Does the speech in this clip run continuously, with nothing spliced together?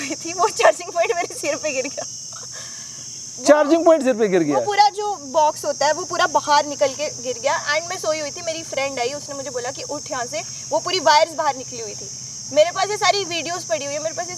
yes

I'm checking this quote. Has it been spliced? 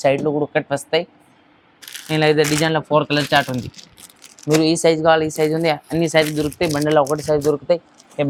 no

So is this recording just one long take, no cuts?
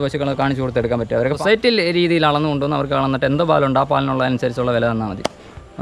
no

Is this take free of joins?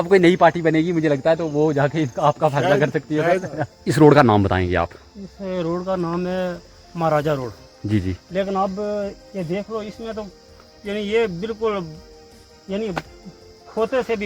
no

